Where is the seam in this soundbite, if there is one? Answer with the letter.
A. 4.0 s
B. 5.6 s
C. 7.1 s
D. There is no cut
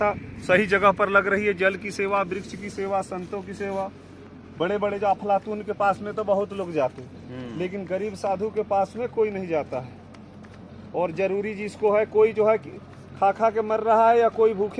D